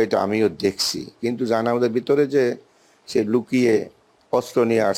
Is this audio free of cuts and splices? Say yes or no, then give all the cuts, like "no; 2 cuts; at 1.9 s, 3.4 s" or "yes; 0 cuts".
yes; 0 cuts